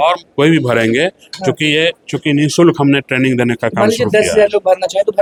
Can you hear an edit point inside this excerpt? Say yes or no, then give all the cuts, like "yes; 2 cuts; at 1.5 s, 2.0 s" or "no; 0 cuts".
no; 0 cuts